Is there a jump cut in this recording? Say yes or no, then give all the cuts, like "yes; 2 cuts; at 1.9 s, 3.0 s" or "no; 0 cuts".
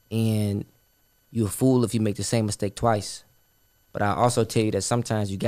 no; 0 cuts